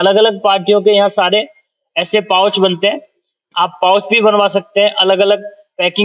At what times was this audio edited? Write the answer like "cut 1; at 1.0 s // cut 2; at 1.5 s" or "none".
none